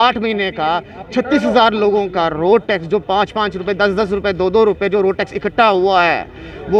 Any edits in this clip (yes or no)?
no